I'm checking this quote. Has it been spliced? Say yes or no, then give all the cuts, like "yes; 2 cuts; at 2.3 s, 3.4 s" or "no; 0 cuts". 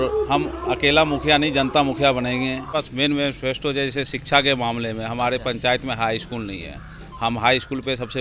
yes; 1 cut; at 2.7 s